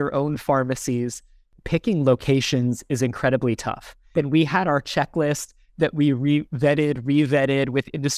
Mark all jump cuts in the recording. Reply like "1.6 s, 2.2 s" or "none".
1.5 s, 3.9 s